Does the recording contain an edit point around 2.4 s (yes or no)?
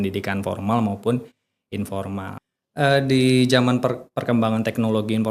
yes